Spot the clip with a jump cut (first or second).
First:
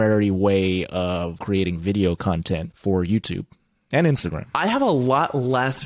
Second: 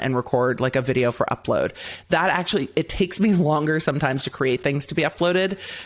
first